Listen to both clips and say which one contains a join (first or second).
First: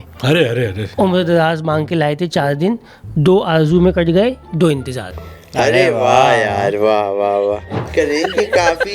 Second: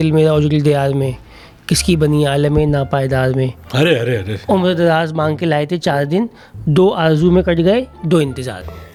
first